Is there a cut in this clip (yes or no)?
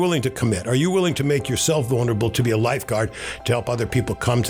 no